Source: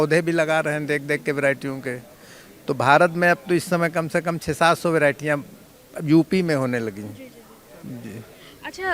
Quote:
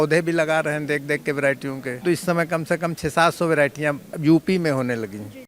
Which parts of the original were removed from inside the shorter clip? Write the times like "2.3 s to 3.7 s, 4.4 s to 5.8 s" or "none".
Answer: 2.0 s to 3.4 s, 5.5 s to 5.9 s

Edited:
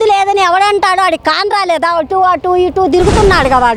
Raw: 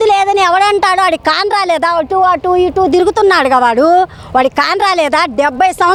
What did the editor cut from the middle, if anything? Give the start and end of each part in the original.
none

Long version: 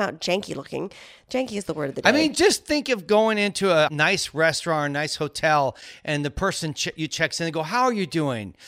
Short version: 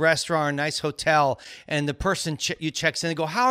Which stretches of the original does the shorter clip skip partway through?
none

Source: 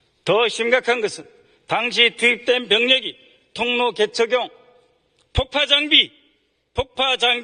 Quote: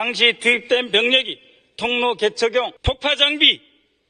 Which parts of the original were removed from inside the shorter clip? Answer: 4.5 s to 5.3 s

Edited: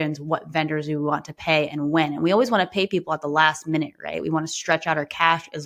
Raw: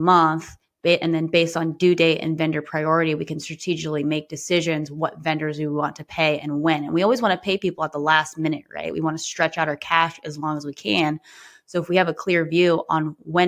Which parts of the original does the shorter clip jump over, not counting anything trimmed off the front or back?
none

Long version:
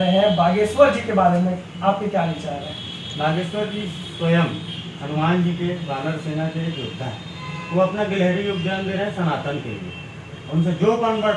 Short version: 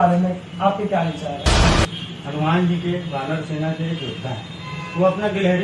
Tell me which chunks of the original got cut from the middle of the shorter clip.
2.9 s to 4.4 s

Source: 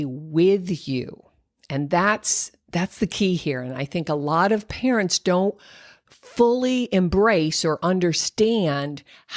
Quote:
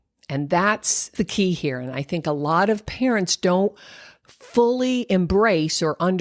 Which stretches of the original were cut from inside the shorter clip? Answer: 2.5 s to 2.9 s

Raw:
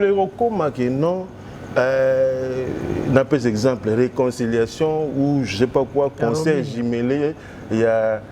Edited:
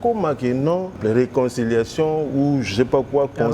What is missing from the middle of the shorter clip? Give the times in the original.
1.3 s to 3.8 s

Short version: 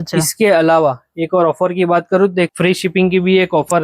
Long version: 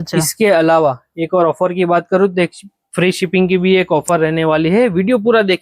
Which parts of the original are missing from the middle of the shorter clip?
2.5 s to 2.9 s

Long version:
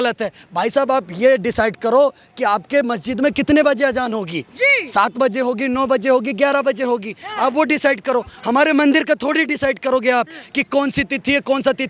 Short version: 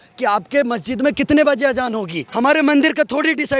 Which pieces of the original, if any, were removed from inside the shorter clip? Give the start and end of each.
4.4 s to 8.3 s

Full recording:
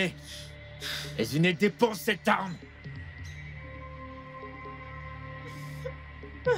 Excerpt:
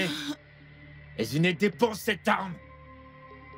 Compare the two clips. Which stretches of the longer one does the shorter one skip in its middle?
2.6 s to 3.7 s

